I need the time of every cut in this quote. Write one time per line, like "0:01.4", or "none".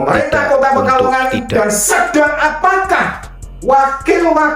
none